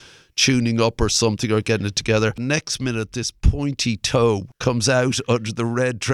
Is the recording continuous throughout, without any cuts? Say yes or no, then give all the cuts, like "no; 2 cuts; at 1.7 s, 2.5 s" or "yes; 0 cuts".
no; 2 cuts; at 2.4 s, 4.5 s